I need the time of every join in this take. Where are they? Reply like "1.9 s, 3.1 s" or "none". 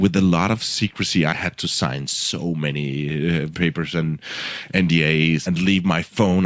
1.8 s, 3.5 s, 5.4 s